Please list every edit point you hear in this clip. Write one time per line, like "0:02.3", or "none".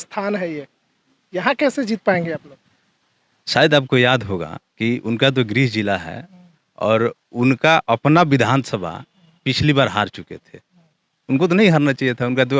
none